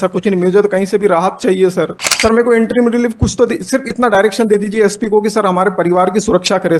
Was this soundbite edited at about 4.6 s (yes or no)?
no